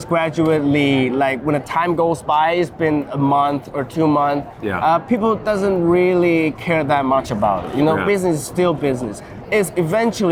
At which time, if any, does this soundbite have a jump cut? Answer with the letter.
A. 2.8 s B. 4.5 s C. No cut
C